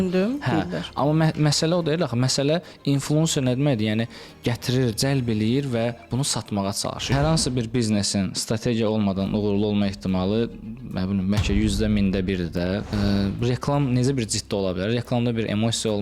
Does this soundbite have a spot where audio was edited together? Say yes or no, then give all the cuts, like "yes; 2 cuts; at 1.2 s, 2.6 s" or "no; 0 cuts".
yes; 2 cuts; at 7.1 s, 12.9 s